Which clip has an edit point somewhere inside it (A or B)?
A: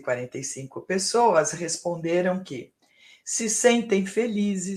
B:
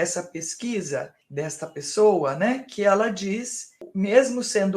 B